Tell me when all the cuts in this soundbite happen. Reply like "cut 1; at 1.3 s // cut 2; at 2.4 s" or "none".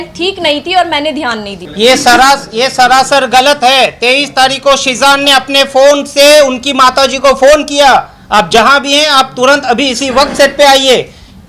cut 1; at 1.6 s